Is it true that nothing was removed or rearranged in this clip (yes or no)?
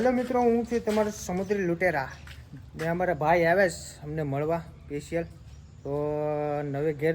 yes